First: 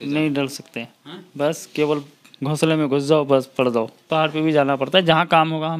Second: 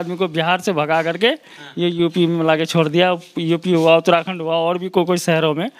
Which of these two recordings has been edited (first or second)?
first